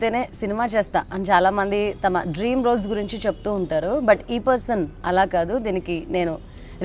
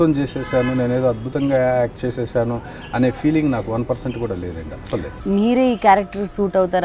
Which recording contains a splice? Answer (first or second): second